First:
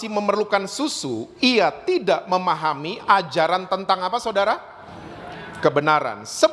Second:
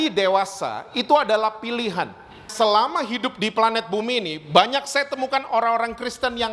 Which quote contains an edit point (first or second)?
second